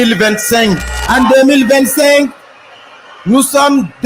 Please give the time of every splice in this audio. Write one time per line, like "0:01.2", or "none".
0:00.9